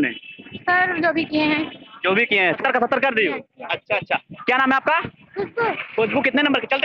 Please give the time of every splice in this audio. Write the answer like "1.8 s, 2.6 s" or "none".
2.6 s